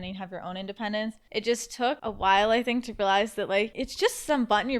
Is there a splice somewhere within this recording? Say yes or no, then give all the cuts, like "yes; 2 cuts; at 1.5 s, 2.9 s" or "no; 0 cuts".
yes; 3 cuts; at 1.2 s, 2.0 s, 3.8 s